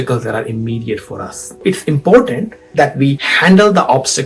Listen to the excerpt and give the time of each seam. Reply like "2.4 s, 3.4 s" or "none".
1.6 s